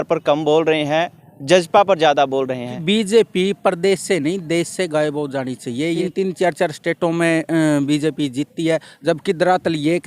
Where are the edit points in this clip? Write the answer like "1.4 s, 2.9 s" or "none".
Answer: 2.7 s, 6.1 s